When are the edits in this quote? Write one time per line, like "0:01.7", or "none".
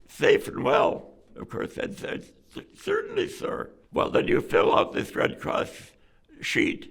0:01.3
0:03.8